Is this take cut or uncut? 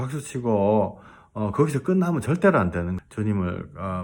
cut